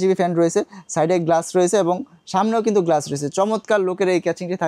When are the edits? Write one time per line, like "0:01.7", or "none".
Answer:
none